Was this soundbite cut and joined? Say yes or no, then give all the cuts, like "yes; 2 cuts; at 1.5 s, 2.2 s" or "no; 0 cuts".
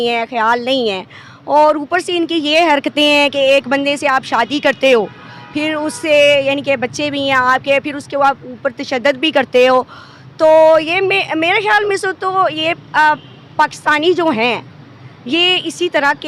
no; 0 cuts